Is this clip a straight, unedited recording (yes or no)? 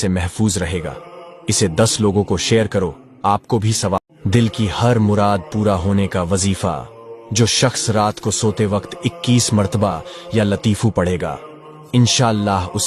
yes